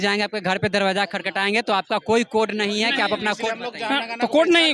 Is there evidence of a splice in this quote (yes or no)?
no